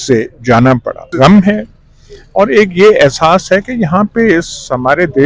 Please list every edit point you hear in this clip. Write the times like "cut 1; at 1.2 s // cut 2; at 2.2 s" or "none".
cut 1; at 1.1 s